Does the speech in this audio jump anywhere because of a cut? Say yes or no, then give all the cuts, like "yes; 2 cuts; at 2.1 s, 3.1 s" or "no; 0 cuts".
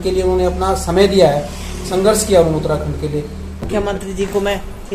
yes; 1 cut; at 3.6 s